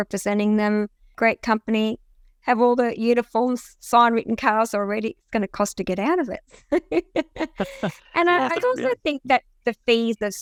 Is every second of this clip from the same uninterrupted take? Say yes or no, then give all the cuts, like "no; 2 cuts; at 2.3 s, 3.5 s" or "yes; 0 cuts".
yes; 0 cuts